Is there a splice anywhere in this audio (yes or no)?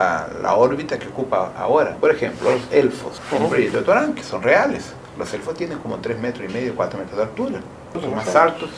yes